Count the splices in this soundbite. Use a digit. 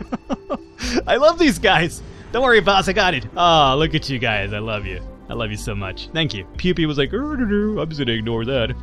1